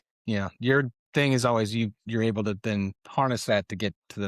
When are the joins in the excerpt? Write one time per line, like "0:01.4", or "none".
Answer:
none